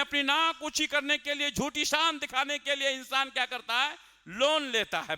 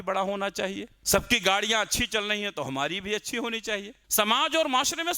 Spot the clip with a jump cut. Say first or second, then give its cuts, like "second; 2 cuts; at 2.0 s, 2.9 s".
second; 2 cuts; at 0.9 s, 4.0 s